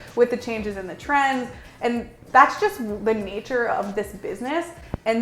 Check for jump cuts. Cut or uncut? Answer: cut